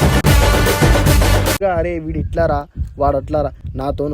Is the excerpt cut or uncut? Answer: cut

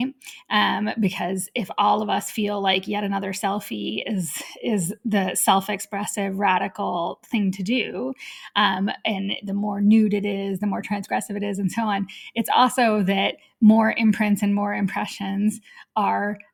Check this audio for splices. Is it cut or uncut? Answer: uncut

